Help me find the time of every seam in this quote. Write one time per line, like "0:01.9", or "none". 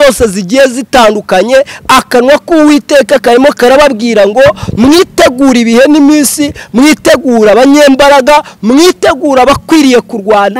none